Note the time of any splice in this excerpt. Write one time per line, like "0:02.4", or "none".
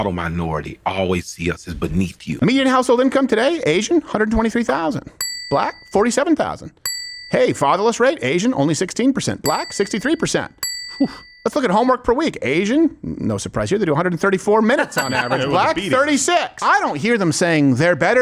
0:02.3
0:16.5